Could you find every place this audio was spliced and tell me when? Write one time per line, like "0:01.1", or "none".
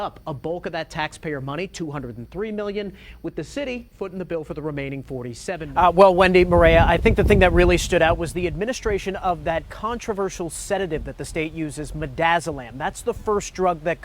0:05.7